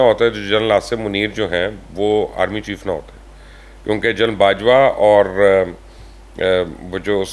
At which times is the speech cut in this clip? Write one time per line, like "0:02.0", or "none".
none